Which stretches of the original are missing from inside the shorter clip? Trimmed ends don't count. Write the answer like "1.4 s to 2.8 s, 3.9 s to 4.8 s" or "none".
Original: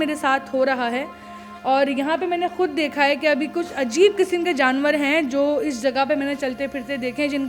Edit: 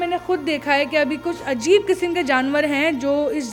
none